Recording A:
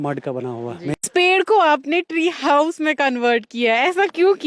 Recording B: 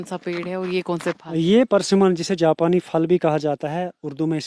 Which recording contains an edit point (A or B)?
A